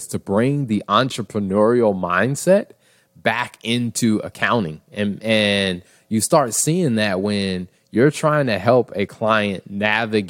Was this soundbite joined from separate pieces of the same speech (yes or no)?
no